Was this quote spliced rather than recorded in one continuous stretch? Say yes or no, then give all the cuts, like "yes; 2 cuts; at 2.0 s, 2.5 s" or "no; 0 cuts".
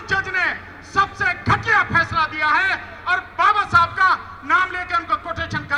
no; 0 cuts